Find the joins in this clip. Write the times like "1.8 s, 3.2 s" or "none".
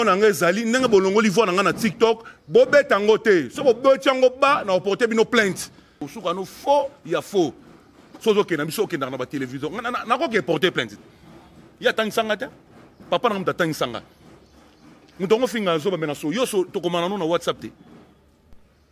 6.0 s